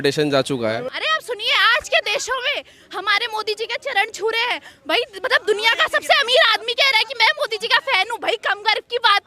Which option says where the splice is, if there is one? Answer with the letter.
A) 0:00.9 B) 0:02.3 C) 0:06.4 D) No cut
A